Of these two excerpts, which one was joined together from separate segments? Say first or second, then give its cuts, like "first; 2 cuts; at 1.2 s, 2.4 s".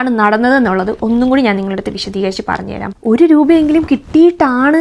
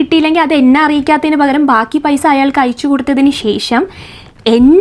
first; 1 cut; at 2.8 s